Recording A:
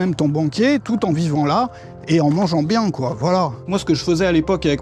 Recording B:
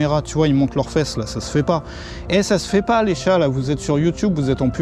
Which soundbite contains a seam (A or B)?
A